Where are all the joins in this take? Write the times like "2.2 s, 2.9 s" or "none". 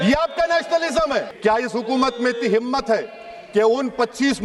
1.3 s